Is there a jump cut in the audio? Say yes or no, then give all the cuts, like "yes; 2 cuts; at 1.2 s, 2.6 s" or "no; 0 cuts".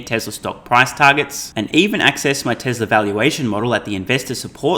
no; 0 cuts